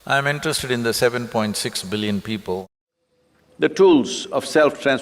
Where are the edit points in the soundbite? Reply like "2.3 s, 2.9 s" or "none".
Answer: 2.6 s